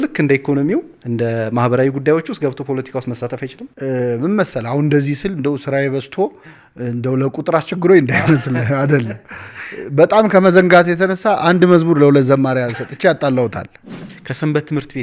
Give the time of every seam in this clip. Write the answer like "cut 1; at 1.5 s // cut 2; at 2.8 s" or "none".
cut 1; at 3.6 s // cut 2; at 14.1 s